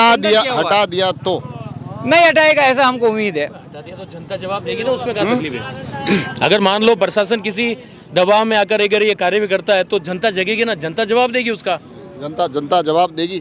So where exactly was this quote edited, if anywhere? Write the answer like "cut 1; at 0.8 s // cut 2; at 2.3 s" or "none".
none